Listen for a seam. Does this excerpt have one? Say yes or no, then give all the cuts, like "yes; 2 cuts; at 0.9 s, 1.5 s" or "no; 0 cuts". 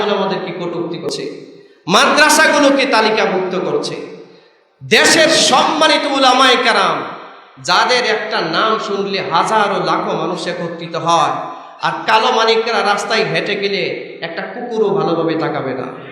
yes; 1 cut; at 1.0 s